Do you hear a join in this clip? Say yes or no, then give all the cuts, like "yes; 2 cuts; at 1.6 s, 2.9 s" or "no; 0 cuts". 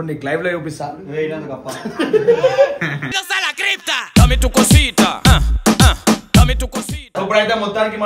yes; 1 cut; at 7.0 s